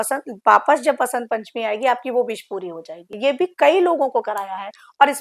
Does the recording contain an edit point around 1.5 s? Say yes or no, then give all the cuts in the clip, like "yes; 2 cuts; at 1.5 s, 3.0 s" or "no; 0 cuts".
no; 1 cut; at 3.1 s